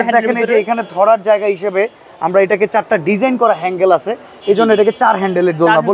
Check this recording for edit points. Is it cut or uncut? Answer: uncut